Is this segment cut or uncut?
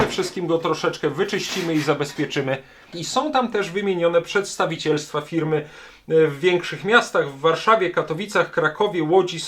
cut